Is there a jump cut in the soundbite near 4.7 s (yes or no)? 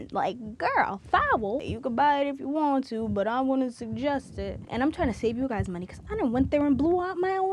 yes